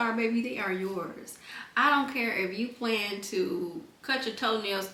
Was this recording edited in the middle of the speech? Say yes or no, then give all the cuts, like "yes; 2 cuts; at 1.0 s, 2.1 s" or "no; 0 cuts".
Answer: no; 0 cuts